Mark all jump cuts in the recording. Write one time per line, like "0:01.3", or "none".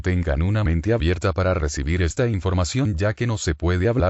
none